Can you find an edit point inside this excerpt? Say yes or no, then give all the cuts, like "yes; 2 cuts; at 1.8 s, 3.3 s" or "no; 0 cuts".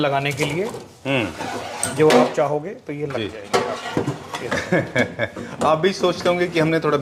no; 0 cuts